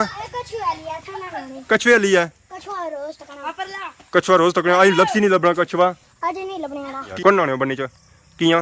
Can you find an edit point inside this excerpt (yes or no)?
yes